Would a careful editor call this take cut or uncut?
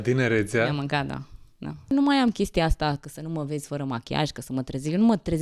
cut